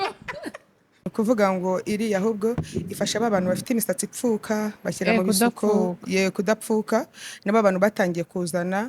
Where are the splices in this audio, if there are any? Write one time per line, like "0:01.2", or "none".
0:01.1